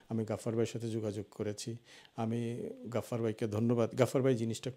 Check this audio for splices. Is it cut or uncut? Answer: uncut